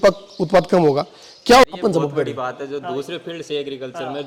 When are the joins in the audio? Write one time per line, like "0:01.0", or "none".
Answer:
0:01.6